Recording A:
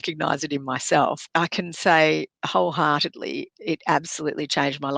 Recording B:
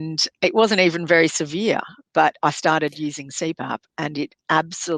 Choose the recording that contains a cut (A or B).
A